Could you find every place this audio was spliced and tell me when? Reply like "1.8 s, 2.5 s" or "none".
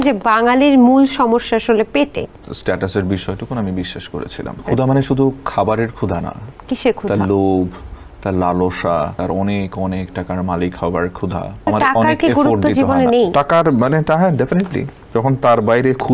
2.4 s, 4.6 s, 9.2 s, 11.7 s, 15.0 s

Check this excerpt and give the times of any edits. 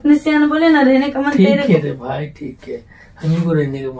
none

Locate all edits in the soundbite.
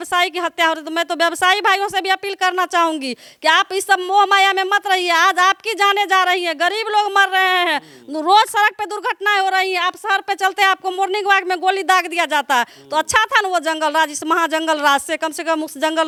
none

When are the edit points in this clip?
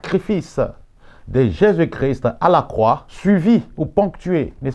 3.1 s

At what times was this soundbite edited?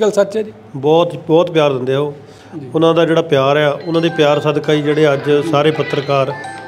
none

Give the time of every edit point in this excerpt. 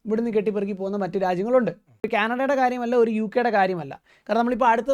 2.1 s

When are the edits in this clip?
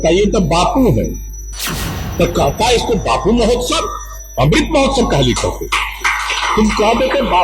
none

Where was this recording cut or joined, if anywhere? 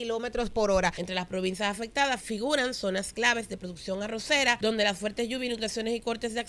1.0 s, 2.2 s, 4.6 s

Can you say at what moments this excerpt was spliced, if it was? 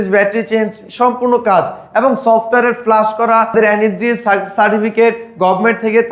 3.5 s

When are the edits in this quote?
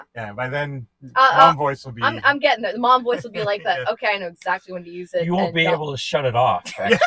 none

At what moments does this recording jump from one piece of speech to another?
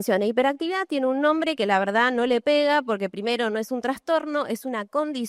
none

